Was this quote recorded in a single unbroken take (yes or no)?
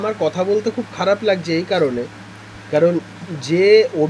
yes